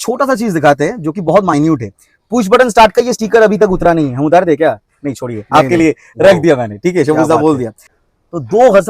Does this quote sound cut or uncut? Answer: cut